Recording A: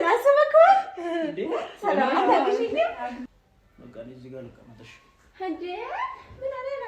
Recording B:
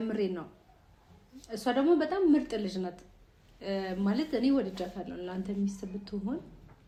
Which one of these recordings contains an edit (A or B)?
A